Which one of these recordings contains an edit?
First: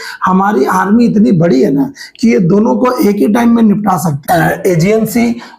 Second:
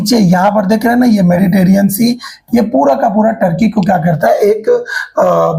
first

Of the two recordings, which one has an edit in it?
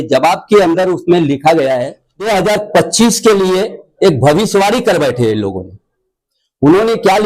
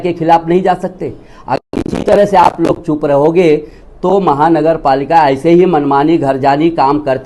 first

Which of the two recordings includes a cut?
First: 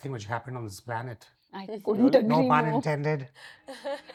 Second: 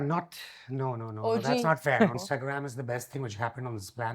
second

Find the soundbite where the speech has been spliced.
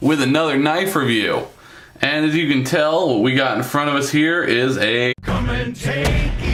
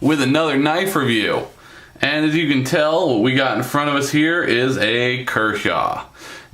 second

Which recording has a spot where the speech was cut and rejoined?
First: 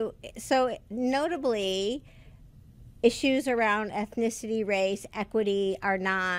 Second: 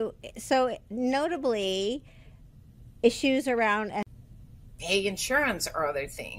first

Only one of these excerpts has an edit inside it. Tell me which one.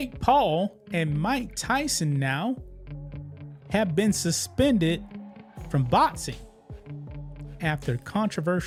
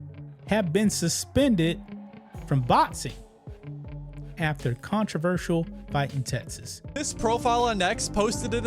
second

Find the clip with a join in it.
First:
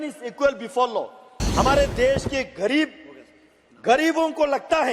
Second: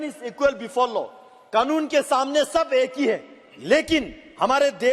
first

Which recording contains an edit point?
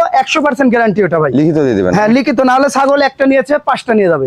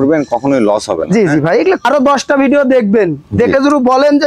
second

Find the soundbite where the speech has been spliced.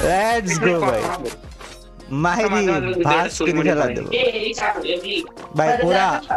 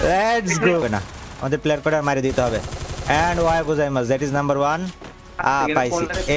second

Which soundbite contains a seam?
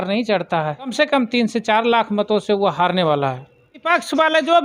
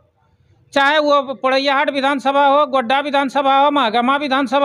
first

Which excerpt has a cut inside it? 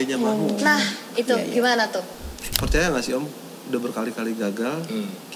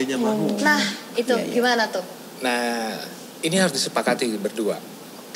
first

